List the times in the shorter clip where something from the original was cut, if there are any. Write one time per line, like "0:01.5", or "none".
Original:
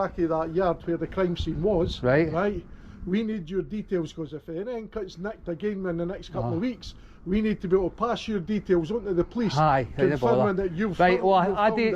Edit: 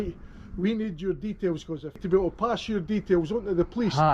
0:02.0